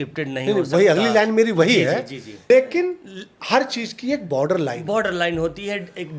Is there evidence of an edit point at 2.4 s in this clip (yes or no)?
yes